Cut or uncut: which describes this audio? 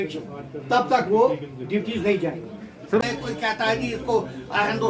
cut